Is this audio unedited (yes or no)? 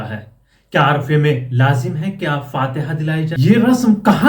no